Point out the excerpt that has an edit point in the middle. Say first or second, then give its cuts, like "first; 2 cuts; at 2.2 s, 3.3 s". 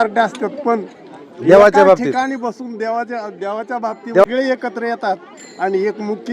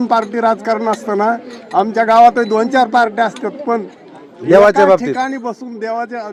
first; 1 cut; at 4.2 s